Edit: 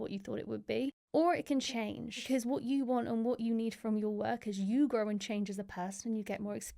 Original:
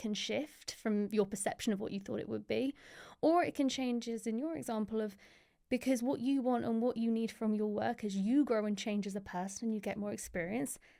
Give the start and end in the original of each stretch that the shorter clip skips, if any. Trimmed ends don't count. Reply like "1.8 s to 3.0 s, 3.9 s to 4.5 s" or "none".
2.8 s to 3.1 s, 3.8 s to 5.3 s